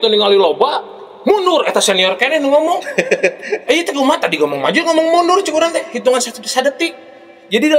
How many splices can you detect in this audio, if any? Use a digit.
0